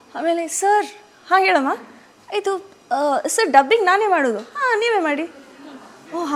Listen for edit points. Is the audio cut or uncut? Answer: uncut